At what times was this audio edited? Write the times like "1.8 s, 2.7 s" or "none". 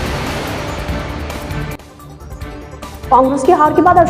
2.8 s